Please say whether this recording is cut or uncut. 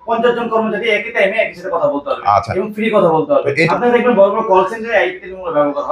uncut